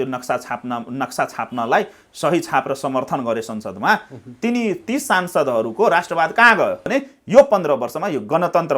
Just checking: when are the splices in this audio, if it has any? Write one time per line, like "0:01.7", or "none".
0:06.9